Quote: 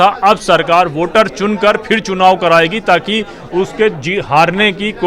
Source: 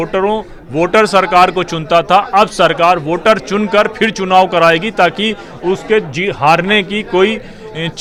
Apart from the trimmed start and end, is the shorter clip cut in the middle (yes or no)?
no